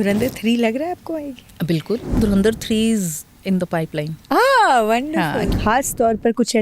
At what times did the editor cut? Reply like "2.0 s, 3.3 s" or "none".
2.1 s, 3.3 s, 5.5 s